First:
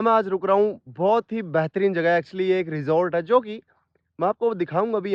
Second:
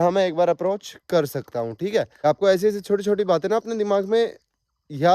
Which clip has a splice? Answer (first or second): second